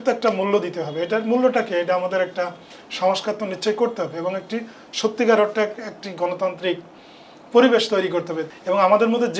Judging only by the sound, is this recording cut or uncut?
cut